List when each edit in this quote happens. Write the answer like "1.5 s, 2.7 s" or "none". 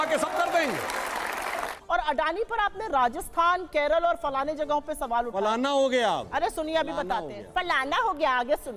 1.7 s

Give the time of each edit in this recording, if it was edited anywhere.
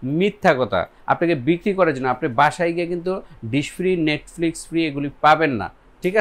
none

